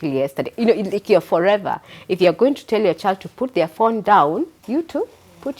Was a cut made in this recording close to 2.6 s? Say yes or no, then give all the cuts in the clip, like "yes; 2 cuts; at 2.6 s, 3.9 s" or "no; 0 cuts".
no; 1 cut; at 4.6 s